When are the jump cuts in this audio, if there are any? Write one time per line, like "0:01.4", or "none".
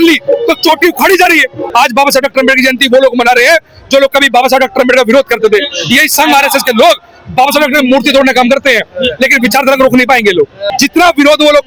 0:01.6
0:10.6